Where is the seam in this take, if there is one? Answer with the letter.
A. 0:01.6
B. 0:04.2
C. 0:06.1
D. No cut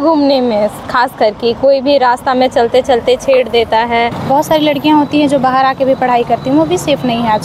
B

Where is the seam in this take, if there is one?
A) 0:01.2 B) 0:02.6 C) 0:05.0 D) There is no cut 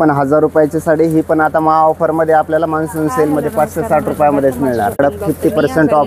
C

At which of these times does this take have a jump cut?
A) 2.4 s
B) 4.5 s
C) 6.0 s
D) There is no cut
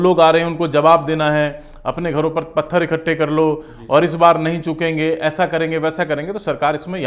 D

